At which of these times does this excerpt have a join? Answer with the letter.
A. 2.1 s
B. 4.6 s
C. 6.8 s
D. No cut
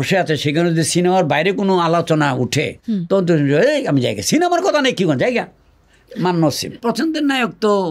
C